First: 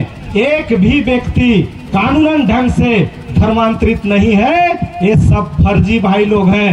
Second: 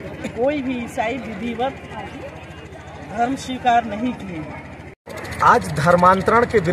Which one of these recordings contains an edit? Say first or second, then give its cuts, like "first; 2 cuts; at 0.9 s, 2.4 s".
second; 1 cut; at 5.0 s